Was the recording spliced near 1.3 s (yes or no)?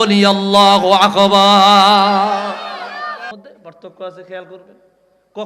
no